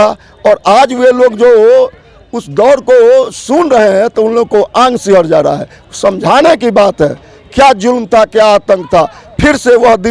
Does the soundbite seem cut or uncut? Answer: uncut